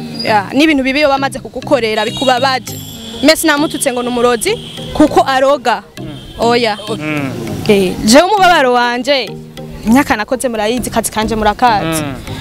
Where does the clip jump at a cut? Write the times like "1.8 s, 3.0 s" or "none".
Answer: 6.9 s